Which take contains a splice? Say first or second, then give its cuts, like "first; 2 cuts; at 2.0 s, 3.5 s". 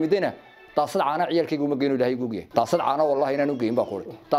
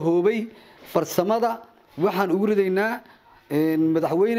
first; 1 cut; at 2.4 s